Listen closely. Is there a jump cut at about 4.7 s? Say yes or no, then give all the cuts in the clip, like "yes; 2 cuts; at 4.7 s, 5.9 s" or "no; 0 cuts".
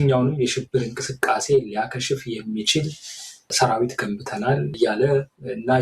yes; 2 cuts; at 3.5 s, 4.7 s